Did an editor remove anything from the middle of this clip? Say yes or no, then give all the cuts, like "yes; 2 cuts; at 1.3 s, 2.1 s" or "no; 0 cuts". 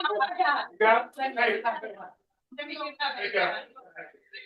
no; 0 cuts